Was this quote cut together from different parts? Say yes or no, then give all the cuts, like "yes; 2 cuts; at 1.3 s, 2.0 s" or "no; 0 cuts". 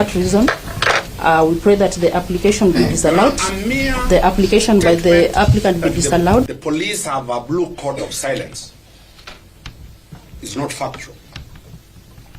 yes; 1 cut; at 6.5 s